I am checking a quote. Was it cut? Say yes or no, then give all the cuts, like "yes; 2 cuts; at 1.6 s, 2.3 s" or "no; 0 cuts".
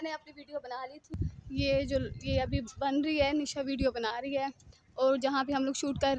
yes; 1 cut; at 1.3 s